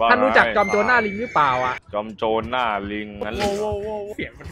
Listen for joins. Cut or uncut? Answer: cut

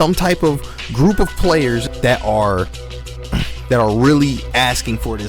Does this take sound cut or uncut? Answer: cut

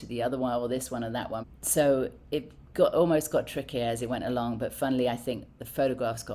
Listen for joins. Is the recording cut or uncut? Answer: cut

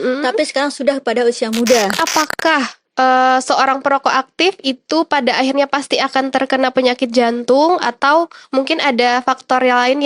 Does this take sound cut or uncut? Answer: cut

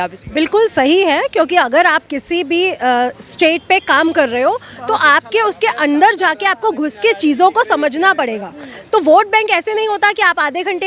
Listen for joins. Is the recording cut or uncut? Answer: uncut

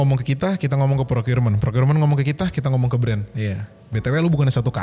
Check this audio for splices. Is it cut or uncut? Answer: uncut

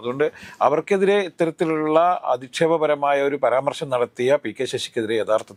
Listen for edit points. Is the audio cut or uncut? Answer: uncut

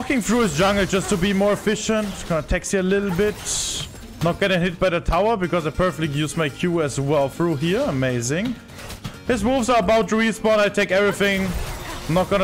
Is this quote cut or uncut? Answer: uncut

